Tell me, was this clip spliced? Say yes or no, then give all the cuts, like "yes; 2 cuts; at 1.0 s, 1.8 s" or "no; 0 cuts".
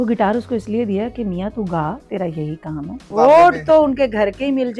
yes; 1 cut; at 3.0 s